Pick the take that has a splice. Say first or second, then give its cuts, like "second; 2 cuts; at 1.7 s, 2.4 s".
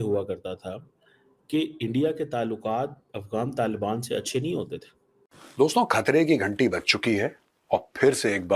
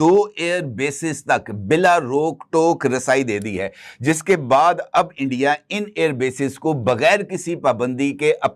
first; 1 cut; at 5.4 s